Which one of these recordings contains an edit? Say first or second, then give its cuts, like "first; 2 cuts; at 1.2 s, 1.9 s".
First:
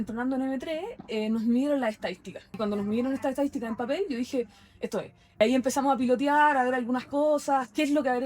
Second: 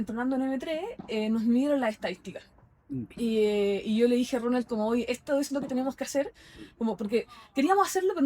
first; 2 cuts; at 2.6 s, 5.4 s